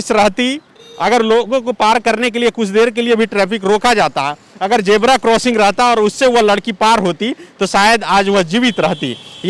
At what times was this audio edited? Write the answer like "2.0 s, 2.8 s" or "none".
none

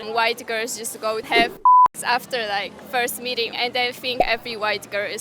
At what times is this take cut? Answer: 1.3 s, 3.5 s

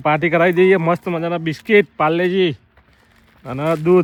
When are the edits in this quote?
none

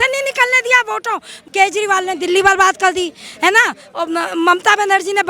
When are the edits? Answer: 1.3 s

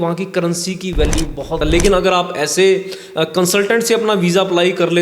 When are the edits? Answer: 1.6 s

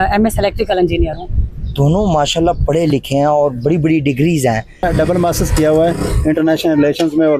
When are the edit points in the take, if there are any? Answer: 4.8 s

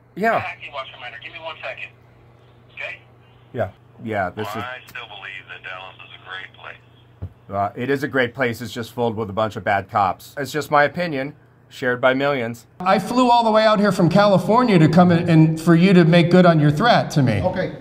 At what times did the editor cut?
3.8 s, 10.4 s, 12.8 s

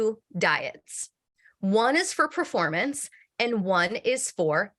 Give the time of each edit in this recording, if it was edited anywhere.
none

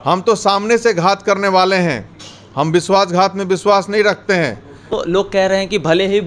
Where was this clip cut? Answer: 4.9 s

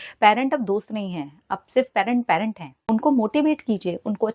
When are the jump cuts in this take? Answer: 2.7 s

